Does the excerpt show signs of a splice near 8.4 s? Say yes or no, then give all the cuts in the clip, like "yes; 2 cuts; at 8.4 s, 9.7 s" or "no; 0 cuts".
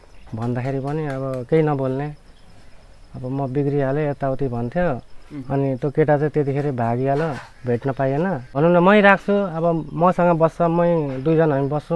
yes; 1 cut; at 8.4 s